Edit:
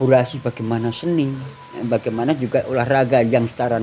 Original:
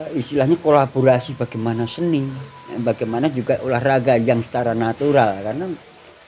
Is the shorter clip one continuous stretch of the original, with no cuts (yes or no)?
yes